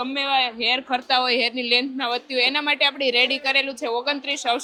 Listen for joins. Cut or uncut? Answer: uncut